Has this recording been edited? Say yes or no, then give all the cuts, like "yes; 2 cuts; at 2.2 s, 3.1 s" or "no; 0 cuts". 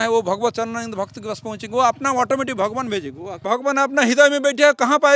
yes; 1 cut; at 3.4 s